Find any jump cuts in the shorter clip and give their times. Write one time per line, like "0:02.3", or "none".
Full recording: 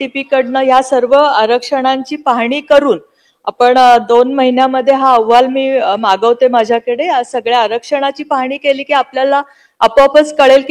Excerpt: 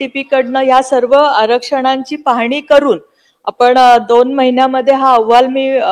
none

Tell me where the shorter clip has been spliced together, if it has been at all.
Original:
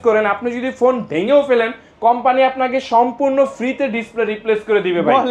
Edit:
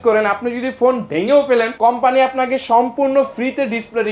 0:01.7

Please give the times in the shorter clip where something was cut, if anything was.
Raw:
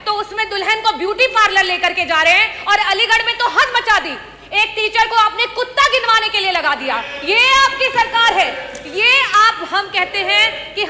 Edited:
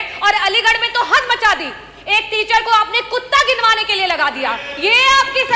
none

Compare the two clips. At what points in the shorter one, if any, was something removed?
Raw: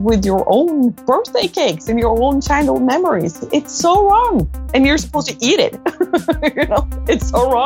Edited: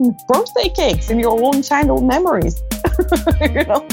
0:02.7

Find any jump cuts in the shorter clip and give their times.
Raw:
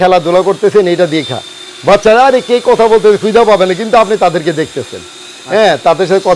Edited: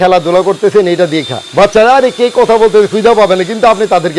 0:01.4

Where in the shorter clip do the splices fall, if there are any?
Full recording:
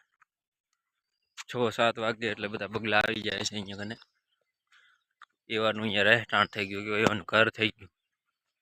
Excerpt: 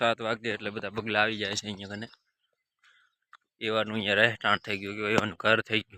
0:01.5

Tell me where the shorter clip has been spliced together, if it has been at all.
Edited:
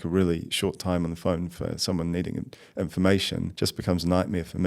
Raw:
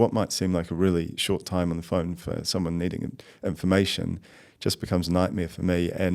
0:03.5

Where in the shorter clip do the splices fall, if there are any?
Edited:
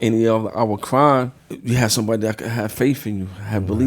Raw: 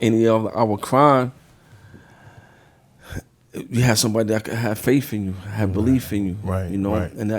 0:01.5

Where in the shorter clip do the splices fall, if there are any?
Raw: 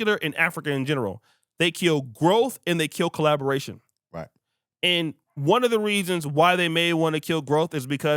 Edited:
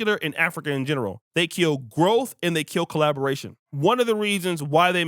0:01.2
0:03.6

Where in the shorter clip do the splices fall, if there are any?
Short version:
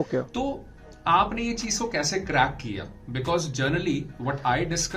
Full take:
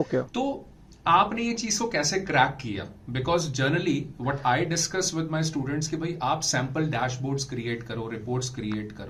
none

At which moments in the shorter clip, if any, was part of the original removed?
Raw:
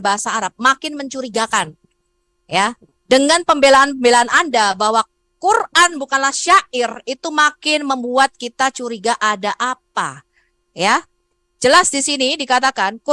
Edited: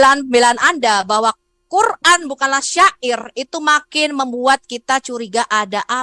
none

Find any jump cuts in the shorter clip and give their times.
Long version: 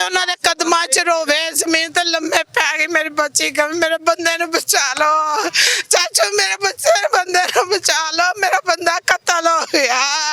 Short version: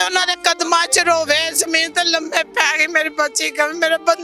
none

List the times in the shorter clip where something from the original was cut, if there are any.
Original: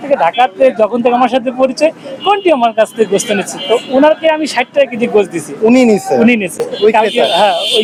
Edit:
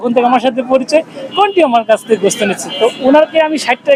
none

